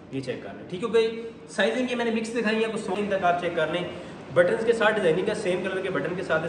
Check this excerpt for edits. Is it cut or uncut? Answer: cut